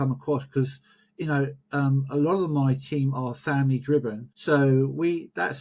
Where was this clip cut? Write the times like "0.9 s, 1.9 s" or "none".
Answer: 4.2 s